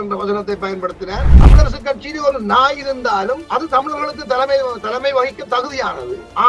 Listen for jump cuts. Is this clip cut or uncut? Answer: cut